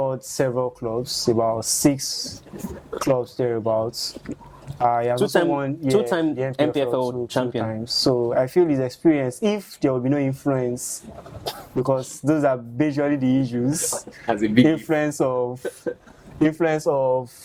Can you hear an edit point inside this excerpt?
no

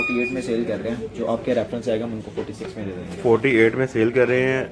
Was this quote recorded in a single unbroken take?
yes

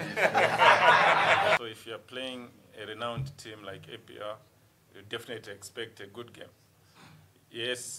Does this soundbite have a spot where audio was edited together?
yes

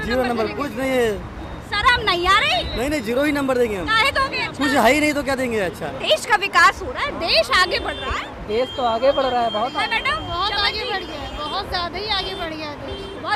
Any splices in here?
no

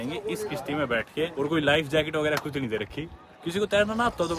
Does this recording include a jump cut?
no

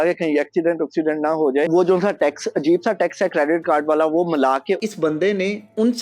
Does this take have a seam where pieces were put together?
yes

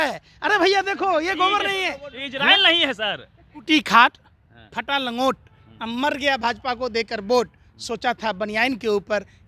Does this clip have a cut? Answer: yes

